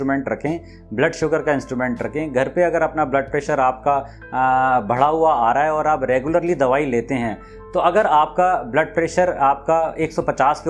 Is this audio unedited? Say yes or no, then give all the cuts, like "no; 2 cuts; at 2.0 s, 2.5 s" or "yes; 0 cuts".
yes; 0 cuts